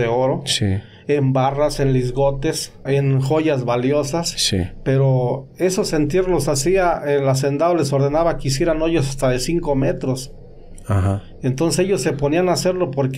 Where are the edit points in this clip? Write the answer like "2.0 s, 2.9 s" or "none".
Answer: 2.9 s